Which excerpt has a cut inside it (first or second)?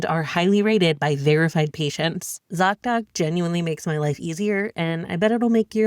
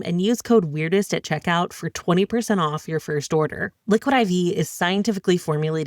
first